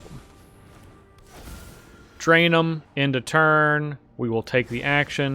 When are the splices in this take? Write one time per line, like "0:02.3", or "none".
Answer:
0:02.9